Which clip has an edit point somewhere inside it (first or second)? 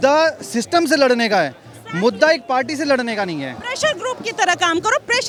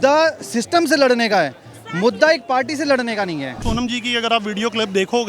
second